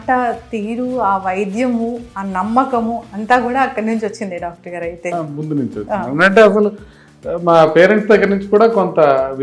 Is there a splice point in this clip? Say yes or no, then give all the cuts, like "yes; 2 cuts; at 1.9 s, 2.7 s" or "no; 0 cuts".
yes; 1 cut; at 5.1 s